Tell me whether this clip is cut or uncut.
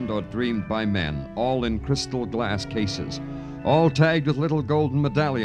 uncut